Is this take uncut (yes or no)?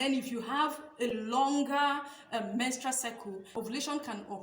no